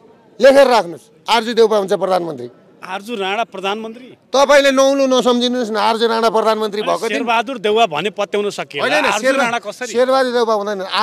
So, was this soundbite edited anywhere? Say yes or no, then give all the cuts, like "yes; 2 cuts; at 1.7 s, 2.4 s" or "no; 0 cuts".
no; 0 cuts